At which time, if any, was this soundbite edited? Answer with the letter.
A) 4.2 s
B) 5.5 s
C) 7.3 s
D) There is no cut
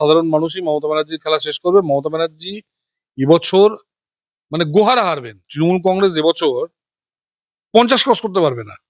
B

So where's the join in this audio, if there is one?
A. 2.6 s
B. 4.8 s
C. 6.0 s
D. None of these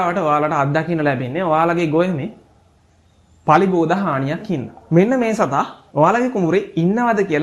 B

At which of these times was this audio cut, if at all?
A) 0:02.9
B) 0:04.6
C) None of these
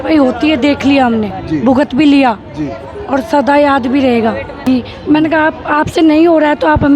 B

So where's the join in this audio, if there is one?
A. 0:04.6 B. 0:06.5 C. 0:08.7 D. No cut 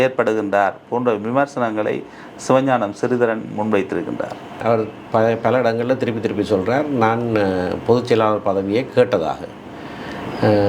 A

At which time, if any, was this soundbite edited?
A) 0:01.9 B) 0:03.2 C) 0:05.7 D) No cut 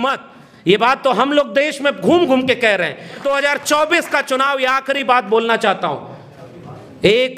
B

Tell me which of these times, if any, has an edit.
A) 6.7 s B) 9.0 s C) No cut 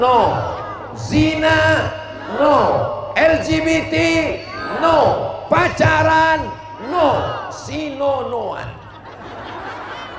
C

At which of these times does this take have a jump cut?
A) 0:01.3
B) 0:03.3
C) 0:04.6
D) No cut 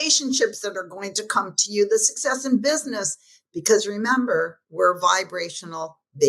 C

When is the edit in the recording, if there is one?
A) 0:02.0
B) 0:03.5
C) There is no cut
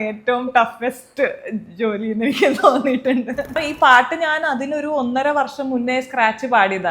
B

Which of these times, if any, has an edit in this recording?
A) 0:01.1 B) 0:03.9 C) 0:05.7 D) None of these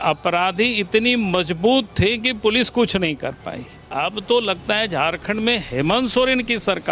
B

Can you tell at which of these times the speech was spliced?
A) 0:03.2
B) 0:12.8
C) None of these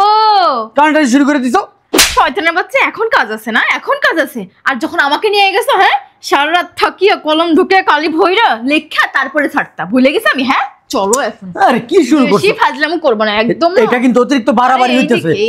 C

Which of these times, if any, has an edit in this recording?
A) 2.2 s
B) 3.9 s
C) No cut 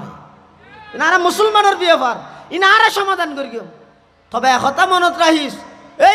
C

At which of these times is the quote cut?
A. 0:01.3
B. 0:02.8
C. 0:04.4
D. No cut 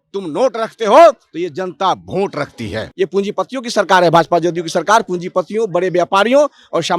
B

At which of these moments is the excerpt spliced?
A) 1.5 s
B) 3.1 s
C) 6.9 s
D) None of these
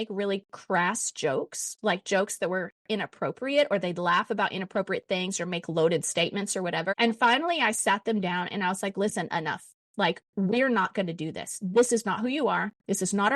C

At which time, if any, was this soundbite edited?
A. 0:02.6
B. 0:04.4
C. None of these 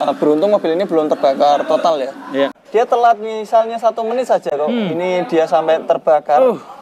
A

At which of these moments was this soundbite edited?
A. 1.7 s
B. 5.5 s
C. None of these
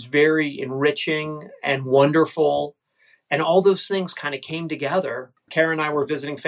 B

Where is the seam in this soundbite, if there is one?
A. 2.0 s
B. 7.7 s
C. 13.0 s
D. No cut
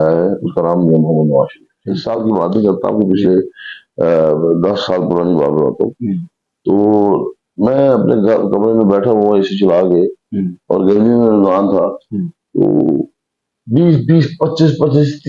A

